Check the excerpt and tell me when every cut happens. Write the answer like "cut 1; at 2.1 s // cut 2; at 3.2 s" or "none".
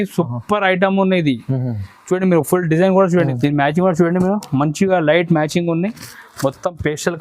cut 1; at 3.3 s